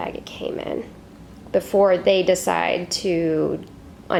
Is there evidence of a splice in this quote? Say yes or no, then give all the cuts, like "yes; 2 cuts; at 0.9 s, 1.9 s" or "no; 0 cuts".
no; 0 cuts